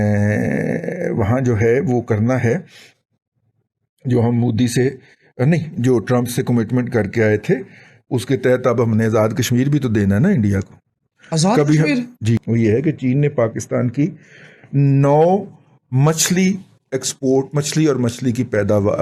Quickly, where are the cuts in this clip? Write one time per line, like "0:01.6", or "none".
0:12.4